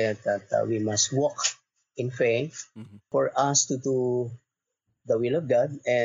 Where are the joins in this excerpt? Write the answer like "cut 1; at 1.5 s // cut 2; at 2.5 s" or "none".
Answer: cut 1; at 3.1 s